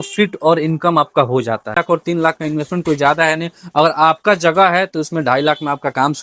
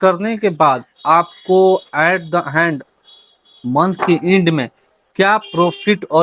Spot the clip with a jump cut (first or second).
first